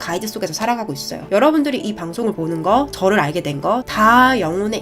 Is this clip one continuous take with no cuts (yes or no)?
no